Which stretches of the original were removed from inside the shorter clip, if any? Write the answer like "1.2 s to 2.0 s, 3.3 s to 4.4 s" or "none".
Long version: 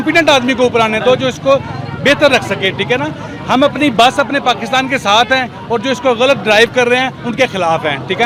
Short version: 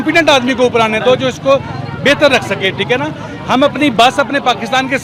none